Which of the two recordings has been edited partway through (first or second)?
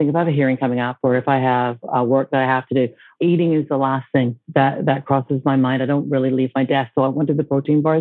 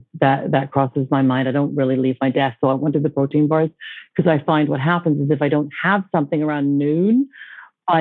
first